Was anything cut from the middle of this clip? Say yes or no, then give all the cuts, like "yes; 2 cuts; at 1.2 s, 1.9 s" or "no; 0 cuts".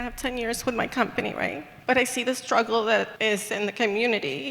yes; 2 cuts; at 1.7 s, 3.1 s